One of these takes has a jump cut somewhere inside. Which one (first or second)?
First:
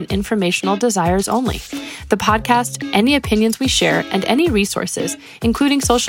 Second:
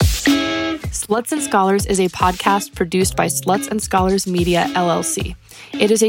second